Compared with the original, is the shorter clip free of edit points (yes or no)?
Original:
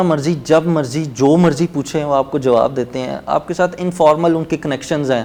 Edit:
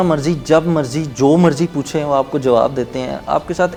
yes